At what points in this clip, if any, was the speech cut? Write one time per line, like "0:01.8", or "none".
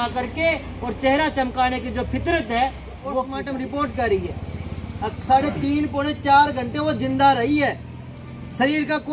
0:03.4

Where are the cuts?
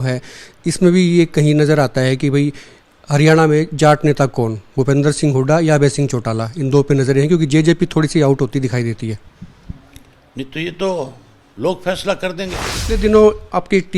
0:12.7

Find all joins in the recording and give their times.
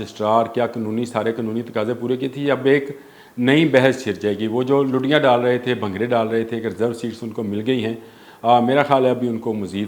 none

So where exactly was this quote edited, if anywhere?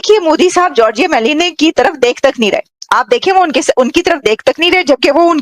none

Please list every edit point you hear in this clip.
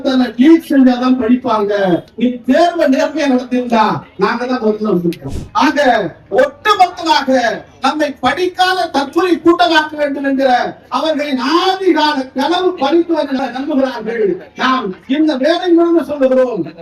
0:02.1
0:05.3
0:13.4

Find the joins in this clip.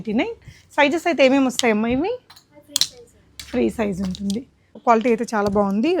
0:04.7

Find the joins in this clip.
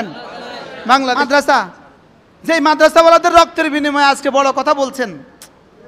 0:01.2

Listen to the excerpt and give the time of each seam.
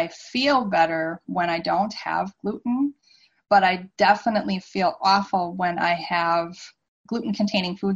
none

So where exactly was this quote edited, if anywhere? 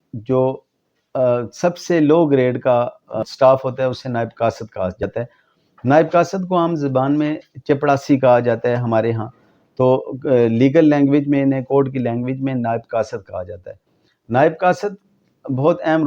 0:03.2
0:05.0

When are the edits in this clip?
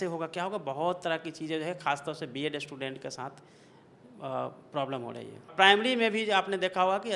0:05.5

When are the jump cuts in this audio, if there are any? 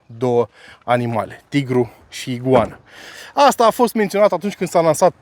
none

